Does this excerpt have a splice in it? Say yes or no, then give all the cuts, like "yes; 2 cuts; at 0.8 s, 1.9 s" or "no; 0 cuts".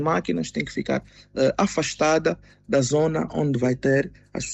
no; 0 cuts